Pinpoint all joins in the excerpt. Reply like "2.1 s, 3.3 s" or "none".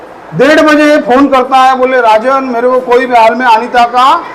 none